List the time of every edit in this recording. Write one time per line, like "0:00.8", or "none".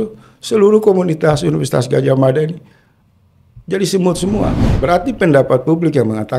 0:04.7